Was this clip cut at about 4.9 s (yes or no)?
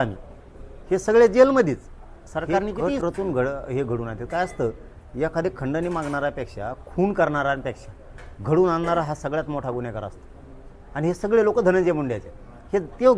no